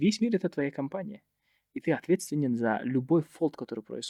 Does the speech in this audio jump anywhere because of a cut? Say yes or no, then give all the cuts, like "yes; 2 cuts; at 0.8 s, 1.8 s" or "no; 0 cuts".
no; 0 cuts